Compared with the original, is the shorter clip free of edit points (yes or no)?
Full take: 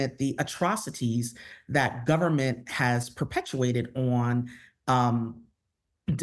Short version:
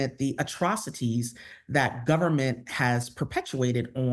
yes